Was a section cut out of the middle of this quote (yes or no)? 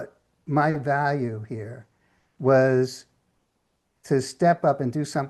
no